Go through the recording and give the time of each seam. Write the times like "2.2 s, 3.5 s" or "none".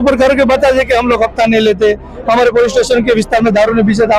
none